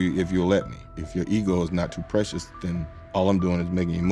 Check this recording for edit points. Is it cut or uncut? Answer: uncut